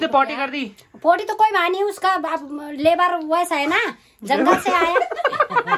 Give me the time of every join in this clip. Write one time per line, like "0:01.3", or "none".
none